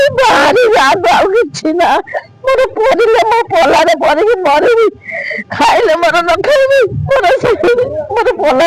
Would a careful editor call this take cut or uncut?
uncut